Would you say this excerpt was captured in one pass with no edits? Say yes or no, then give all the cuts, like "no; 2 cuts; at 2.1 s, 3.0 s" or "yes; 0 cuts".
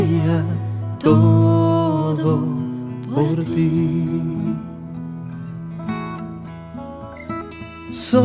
yes; 0 cuts